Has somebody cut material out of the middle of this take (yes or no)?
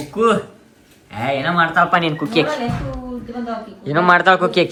no